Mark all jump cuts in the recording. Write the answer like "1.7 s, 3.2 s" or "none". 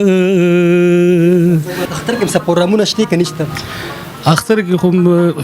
1.8 s